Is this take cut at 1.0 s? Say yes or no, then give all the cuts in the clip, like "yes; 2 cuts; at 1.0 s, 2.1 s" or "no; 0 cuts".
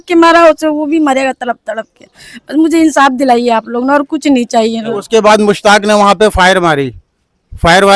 no; 1 cut; at 4.9 s